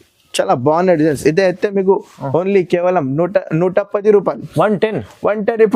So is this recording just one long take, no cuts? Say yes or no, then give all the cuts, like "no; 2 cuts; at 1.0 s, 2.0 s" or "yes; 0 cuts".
yes; 0 cuts